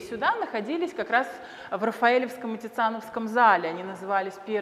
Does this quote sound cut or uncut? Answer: uncut